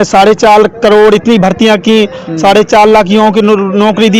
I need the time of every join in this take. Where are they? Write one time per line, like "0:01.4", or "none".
none